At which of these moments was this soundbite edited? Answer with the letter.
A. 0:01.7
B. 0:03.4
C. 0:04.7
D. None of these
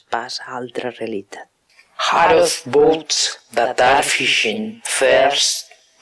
D